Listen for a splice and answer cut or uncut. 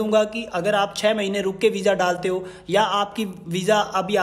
uncut